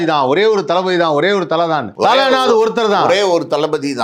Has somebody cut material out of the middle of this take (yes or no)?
yes